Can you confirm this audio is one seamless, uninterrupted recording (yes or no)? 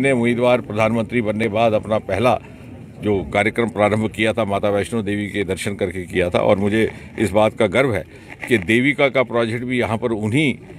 no